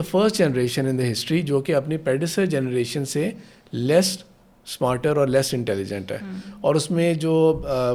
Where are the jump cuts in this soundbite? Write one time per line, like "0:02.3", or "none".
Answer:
none